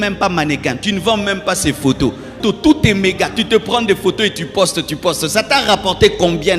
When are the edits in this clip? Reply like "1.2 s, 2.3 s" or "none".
2.4 s

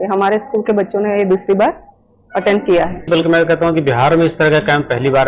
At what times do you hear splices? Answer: 3.1 s

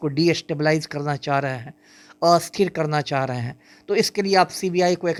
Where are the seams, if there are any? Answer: none

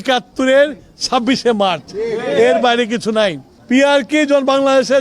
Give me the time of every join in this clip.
3.5 s

